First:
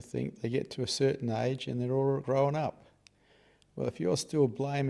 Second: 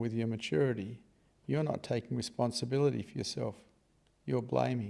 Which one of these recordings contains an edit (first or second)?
first